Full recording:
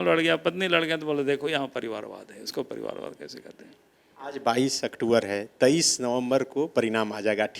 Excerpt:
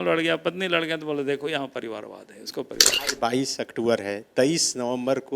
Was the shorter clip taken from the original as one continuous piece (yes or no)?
no